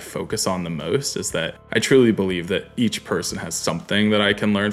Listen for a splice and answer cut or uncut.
cut